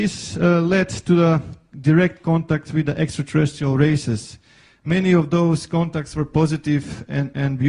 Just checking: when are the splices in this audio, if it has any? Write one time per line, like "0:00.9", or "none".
none